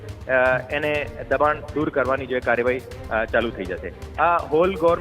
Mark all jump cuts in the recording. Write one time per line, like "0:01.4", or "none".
none